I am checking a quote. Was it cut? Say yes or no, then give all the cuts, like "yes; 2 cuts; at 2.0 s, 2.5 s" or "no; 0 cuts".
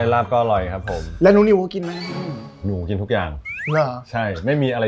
yes; 1 cut; at 1.1 s